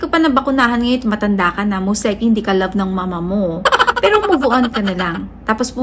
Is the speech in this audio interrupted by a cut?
no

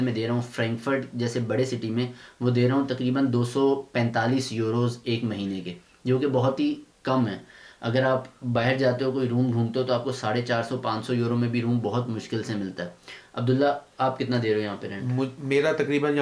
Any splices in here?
no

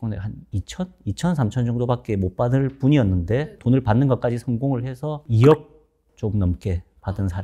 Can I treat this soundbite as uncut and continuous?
no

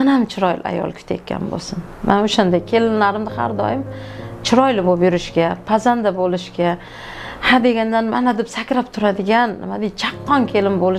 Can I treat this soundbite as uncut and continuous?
yes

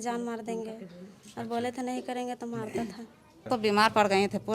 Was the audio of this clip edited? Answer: yes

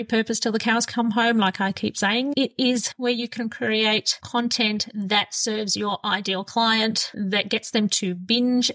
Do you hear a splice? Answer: yes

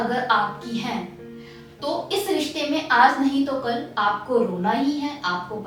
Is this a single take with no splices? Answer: yes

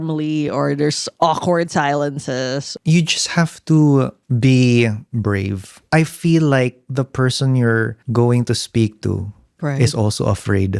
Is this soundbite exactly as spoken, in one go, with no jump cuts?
no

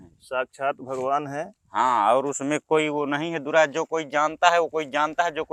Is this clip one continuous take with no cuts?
yes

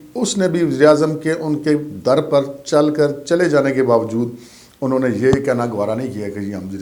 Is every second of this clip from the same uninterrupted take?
yes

